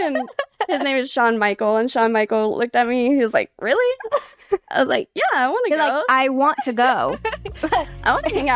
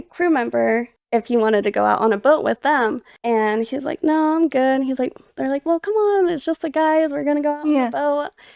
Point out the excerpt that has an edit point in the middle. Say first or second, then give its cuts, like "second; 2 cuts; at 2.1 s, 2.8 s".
second; 2 cuts; at 0.9 s, 2.6 s